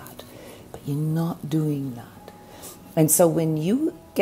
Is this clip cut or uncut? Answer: uncut